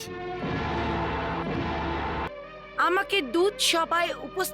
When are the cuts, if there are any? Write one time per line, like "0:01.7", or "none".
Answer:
0:02.3